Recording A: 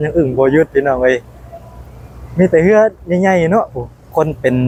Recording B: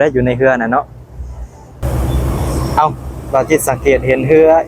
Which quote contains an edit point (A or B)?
B